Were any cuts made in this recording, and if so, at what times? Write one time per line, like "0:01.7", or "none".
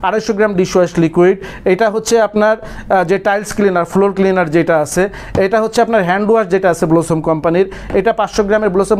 none